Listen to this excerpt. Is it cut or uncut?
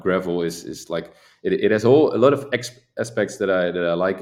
uncut